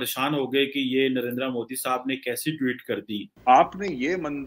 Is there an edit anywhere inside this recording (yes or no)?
yes